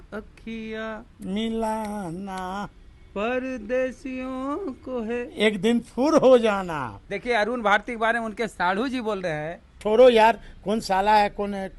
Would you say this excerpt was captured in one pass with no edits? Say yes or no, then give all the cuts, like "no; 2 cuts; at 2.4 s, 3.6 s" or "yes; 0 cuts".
no; 2 cuts; at 7.0 s, 9.8 s